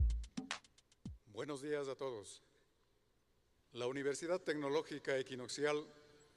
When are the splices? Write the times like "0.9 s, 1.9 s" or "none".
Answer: none